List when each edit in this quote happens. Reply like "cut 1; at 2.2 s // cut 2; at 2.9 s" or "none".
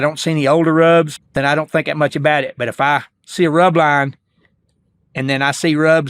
cut 1; at 1.2 s